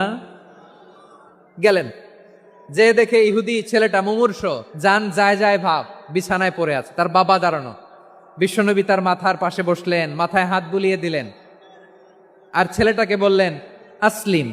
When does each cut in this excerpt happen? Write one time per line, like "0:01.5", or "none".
0:04.7